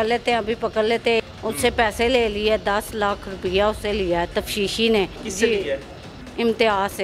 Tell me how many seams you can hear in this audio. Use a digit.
2